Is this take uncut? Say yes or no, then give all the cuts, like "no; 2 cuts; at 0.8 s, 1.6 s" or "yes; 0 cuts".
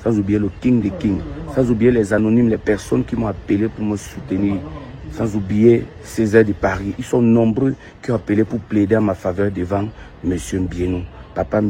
yes; 0 cuts